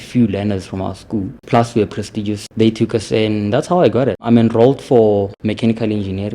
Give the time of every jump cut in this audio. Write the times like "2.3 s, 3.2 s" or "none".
1.4 s, 2.4 s, 4.2 s, 5.3 s